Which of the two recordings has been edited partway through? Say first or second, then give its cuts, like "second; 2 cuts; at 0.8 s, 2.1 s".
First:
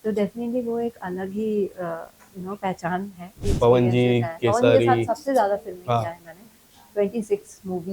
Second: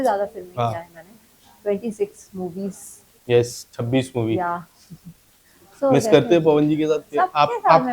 first; 1 cut; at 3.5 s